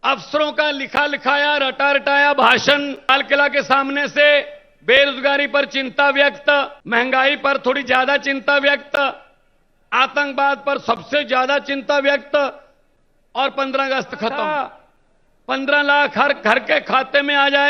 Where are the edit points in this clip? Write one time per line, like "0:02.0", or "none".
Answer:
0:03.1
0:06.8
0:14.5